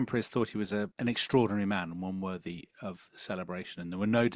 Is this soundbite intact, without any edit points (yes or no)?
no